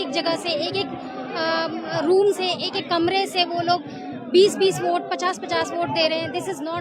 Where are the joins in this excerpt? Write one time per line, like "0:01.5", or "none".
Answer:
none

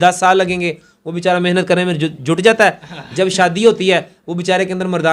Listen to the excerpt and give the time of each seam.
none

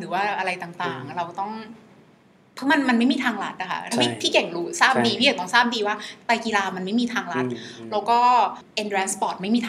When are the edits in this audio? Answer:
0:08.7

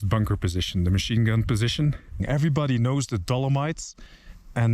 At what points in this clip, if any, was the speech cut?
0:02.2

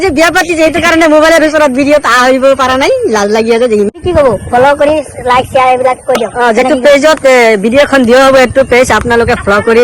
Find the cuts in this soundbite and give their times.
0:03.9

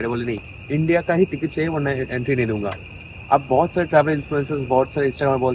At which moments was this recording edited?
none

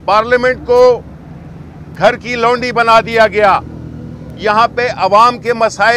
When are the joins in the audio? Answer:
none

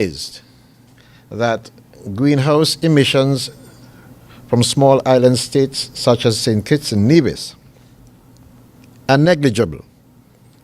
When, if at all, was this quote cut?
none

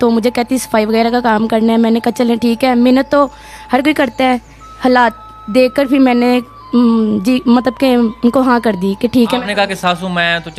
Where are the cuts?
none

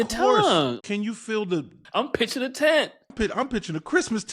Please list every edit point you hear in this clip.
0:00.8
0:01.8
0:03.1

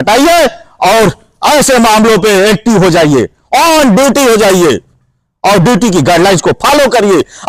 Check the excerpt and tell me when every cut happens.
none

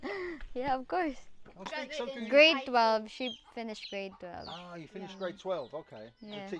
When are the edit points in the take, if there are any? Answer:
0:01.8

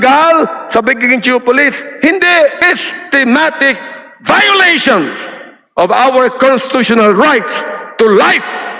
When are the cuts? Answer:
0:02.6

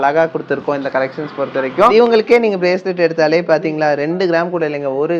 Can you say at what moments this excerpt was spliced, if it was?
0:01.9

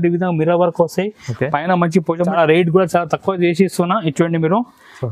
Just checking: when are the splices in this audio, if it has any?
0:02.2

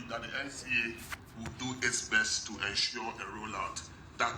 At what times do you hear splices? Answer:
0:01.2

